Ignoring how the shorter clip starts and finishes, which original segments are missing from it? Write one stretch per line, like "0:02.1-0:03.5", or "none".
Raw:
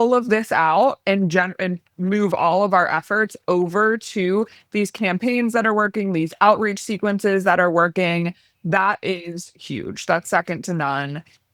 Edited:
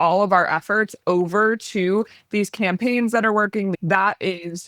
0:06.1-0:08.5